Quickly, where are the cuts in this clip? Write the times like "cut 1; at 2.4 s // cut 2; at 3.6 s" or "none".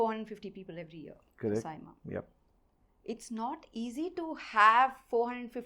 none